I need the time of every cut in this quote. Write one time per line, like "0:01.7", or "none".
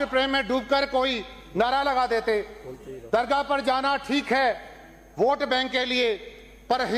none